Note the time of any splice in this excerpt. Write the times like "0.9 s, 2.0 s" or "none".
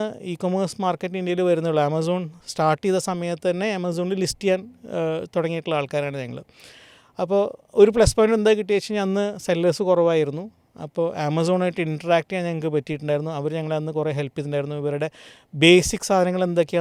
none